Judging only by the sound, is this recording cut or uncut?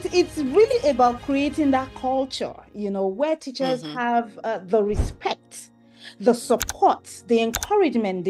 uncut